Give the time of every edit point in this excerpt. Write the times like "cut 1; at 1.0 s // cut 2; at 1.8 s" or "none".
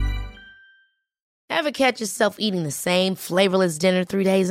cut 1; at 1.3 s

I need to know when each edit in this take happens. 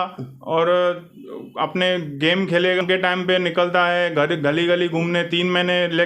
cut 1; at 2.8 s

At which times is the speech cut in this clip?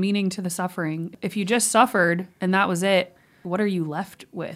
cut 1; at 1.1 s // cut 2; at 3.5 s

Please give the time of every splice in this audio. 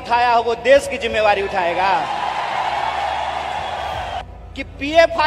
cut 1; at 4.2 s

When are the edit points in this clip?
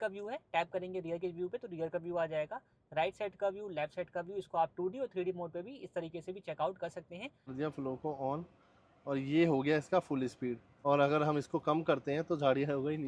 cut 1; at 7.5 s // cut 2; at 10.7 s

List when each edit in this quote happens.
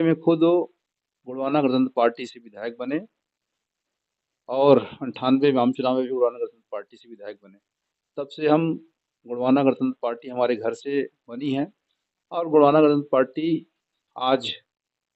none

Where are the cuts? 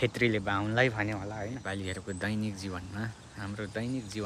cut 1; at 1.7 s

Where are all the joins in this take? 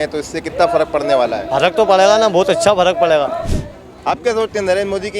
cut 1; at 3.5 s

